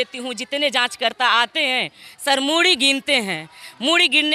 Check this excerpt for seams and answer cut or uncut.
uncut